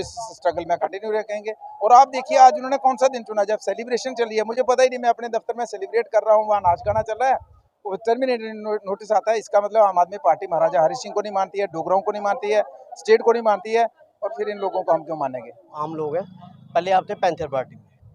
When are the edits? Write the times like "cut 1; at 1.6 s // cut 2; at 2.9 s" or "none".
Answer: cut 1; at 15.7 s